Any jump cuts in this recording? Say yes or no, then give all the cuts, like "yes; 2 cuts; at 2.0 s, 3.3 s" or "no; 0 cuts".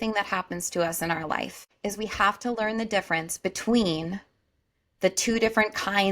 yes; 1 cut; at 1.6 s